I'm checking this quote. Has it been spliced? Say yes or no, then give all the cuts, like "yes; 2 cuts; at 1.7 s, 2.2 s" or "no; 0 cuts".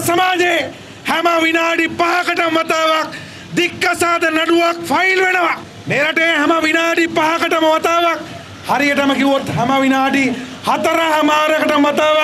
no; 0 cuts